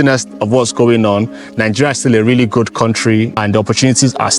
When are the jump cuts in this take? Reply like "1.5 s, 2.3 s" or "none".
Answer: 3.3 s